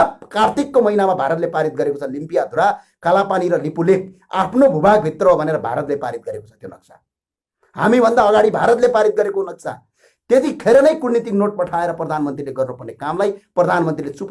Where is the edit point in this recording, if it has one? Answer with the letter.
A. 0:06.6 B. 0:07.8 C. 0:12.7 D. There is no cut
D